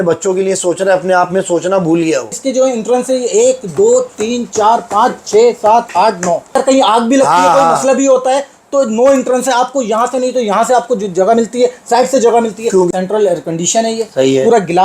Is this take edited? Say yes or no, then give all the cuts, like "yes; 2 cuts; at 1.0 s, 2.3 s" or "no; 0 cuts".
yes; 3 cuts; at 2.3 s, 6.5 s, 12.9 s